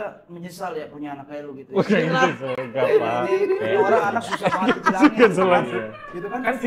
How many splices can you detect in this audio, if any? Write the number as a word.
zero